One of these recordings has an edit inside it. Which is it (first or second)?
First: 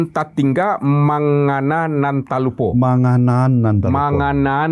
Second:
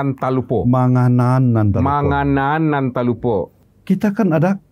second